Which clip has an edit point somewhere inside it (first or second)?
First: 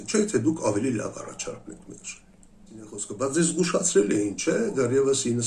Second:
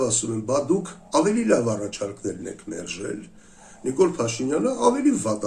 first